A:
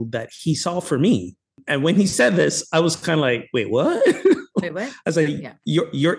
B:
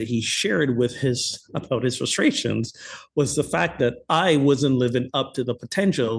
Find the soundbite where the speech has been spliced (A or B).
A